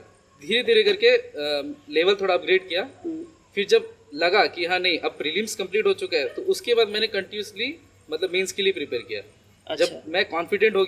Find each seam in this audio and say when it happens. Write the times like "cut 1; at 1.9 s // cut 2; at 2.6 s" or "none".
none